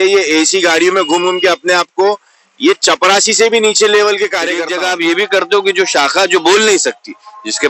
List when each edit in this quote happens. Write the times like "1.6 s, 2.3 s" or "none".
4.6 s